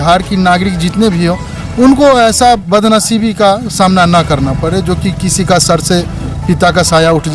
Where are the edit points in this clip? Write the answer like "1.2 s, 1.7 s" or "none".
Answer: none